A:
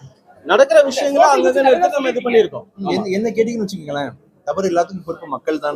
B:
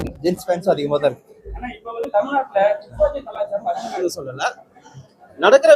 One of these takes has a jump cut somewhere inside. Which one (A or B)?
B